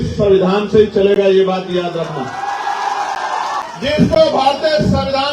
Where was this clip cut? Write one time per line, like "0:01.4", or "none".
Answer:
0:03.6